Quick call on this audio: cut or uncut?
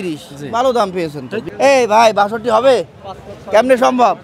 cut